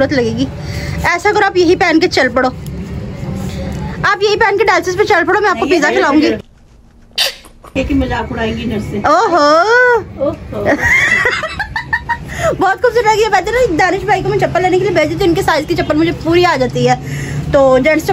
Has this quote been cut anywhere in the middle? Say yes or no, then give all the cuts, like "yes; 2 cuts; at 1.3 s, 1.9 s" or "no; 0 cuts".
no; 0 cuts